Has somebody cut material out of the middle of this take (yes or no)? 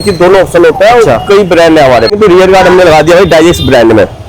yes